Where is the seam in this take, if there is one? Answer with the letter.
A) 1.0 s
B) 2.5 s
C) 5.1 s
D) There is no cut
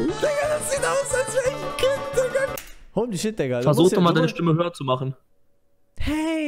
B